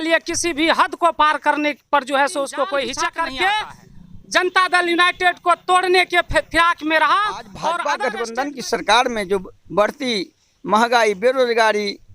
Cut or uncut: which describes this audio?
cut